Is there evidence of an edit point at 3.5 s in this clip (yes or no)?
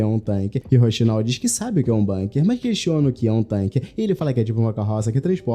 yes